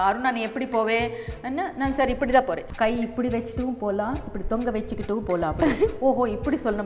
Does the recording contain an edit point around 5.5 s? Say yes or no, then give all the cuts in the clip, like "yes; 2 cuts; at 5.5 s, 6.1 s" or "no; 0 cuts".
no; 1 cut; at 2.7 s